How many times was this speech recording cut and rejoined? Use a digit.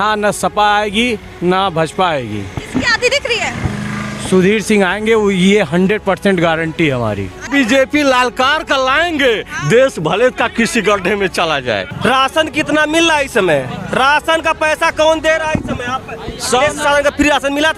2